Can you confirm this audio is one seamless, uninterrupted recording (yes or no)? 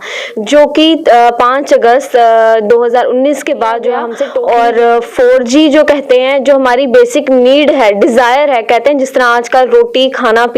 no